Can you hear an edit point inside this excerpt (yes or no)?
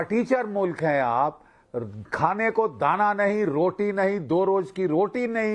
no